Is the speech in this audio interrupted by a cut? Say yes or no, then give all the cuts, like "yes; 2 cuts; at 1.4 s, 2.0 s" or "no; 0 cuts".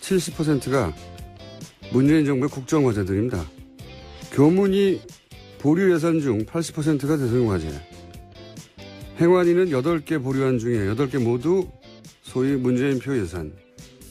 no; 0 cuts